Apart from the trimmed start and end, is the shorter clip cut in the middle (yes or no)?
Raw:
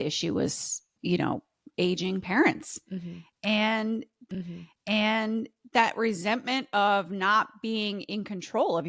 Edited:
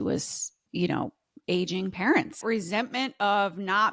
yes